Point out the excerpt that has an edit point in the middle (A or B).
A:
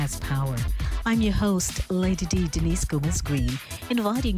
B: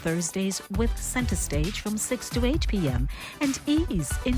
A